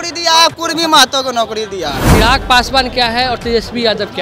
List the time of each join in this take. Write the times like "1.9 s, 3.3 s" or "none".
2.0 s